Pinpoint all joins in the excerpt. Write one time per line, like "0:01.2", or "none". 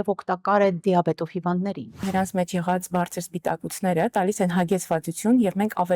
0:02.1